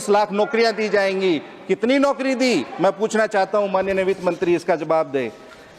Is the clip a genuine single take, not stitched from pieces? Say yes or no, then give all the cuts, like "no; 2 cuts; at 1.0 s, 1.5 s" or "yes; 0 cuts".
yes; 0 cuts